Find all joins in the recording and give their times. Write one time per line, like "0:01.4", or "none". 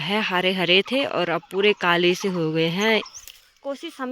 0:03.2